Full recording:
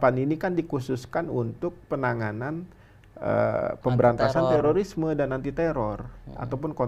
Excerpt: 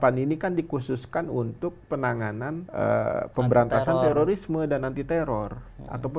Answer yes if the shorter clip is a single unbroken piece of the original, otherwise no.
no